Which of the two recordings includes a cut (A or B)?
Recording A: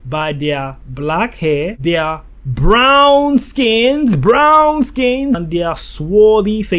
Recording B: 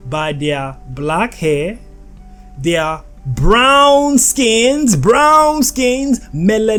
A